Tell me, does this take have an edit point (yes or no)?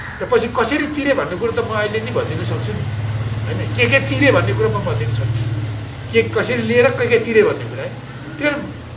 no